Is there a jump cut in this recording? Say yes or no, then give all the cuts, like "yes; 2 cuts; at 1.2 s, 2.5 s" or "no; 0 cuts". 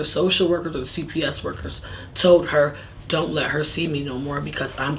no; 0 cuts